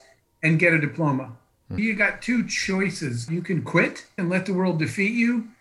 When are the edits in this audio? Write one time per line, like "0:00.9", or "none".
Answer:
0:01.7
0:03.2
0:04.2